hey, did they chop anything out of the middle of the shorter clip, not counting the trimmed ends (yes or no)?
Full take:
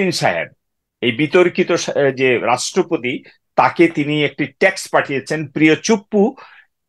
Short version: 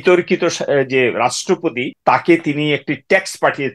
yes